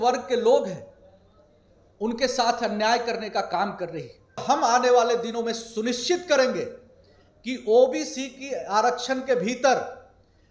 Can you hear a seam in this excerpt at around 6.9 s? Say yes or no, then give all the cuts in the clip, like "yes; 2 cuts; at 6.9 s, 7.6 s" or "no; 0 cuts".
no; 1 cut; at 4.4 s